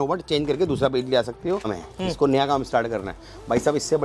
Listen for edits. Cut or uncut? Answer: cut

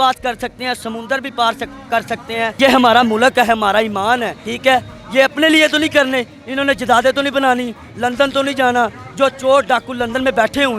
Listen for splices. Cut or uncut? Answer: uncut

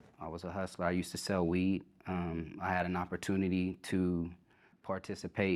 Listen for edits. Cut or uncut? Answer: uncut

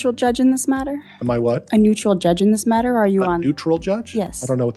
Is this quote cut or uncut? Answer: uncut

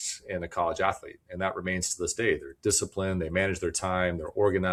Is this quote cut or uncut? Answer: uncut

